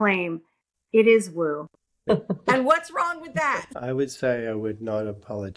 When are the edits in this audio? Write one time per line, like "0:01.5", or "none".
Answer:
0:02.0
0:03.7